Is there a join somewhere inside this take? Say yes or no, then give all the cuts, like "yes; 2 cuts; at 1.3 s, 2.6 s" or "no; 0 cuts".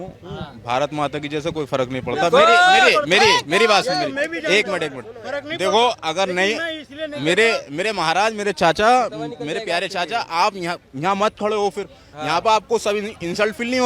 no; 0 cuts